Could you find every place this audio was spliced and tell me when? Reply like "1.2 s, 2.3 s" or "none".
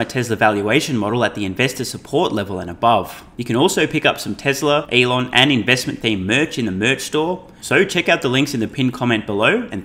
3.3 s, 4.9 s, 7.5 s